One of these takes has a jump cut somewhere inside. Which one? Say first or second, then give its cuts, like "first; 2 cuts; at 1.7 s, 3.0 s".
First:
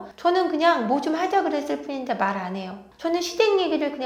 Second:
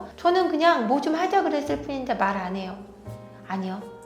first; 1 cut; at 2.8 s